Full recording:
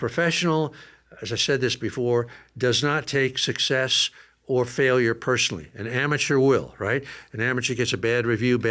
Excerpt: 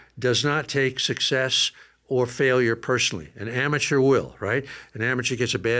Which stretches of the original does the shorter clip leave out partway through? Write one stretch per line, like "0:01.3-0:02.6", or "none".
none